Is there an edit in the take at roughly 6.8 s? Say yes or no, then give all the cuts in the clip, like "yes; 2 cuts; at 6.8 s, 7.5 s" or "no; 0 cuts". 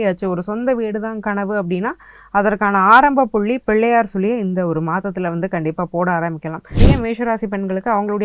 yes; 1 cut; at 6.8 s